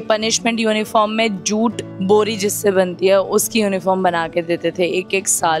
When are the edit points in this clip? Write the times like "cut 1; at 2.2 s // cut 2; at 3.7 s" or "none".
none